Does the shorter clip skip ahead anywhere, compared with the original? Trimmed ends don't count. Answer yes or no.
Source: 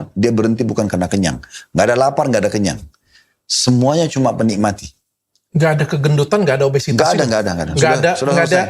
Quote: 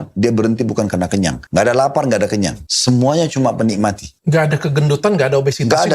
yes